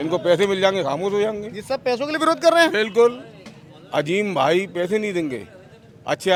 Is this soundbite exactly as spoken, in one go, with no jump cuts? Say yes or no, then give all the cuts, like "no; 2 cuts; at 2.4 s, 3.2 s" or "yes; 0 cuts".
yes; 0 cuts